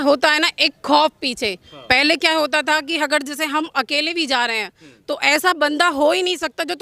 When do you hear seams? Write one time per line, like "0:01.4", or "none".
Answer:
none

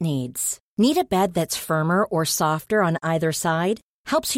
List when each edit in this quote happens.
none

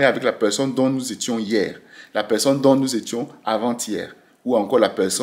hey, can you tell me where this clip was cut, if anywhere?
none

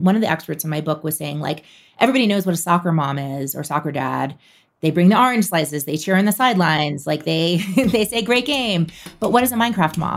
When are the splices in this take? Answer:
none

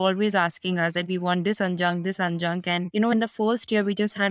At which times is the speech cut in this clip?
0:03.1

